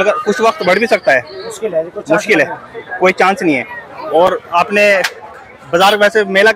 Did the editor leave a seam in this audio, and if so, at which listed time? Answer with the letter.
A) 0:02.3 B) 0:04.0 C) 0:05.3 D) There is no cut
D